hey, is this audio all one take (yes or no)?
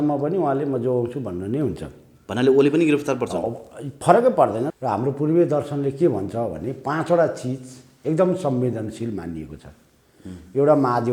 no